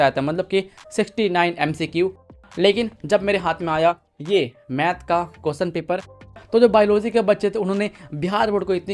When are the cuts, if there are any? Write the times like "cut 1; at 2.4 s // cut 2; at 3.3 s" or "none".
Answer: cut 1; at 2.5 s // cut 2; at 6.4 s